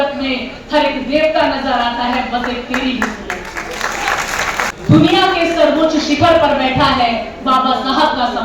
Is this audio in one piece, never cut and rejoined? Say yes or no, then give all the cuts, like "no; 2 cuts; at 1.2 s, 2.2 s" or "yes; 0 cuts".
no; 1 cut; at 4.7 s